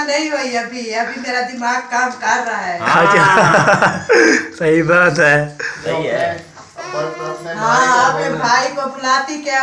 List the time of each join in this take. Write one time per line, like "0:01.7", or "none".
none